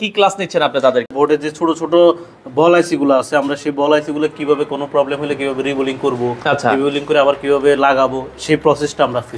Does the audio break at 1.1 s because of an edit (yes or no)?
yes